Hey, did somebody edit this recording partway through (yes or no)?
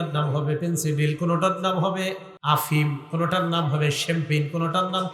yes